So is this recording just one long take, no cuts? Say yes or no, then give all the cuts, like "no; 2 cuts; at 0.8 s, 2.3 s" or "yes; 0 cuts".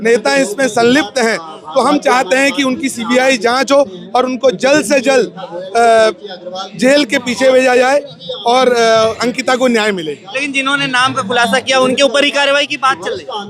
yes; 0 cuts